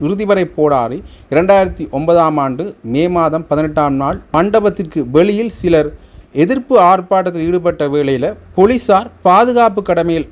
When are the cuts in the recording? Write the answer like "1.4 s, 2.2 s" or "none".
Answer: 4.3 s